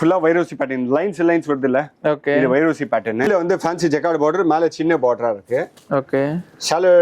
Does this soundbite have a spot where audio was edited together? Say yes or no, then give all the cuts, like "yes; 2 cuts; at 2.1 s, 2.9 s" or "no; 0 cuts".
no; 0 cuts